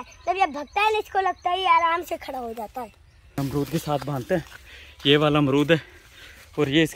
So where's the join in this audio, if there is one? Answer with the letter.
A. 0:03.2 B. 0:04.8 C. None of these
A